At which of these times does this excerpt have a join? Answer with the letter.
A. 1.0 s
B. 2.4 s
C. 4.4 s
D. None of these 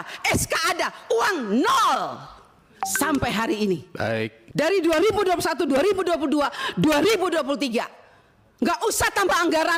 C